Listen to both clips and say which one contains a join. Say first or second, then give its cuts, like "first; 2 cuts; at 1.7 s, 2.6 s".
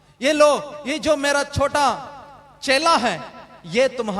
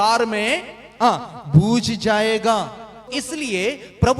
second; 1 cut; at 3.2 s